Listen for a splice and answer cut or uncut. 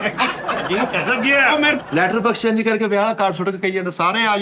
cut